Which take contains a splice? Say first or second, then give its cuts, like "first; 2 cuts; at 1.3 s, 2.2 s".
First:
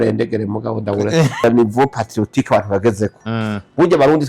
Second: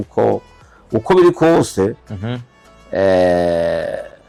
first; 1 cut; at 1.4 s